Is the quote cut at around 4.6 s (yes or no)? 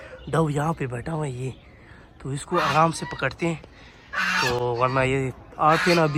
no